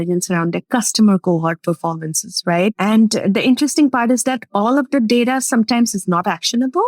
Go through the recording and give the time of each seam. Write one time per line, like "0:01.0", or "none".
0:02.8